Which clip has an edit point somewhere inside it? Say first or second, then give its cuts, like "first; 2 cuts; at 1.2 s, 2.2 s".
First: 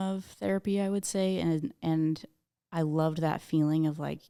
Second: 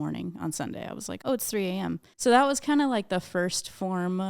second; 2 cuts; at 1.1 s, 2.1 s